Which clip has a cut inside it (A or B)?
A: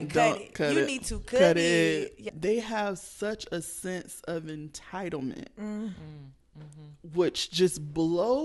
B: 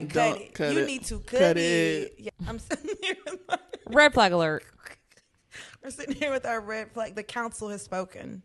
A